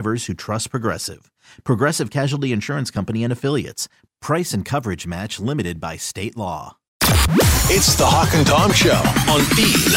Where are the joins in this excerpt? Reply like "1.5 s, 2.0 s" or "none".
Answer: 6.9 s